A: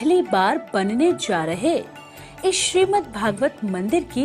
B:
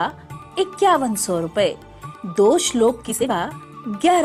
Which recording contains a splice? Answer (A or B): B